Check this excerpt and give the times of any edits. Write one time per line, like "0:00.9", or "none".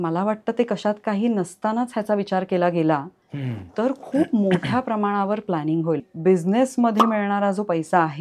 0:06.0